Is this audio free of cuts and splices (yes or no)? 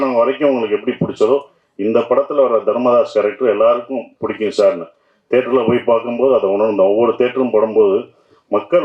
yes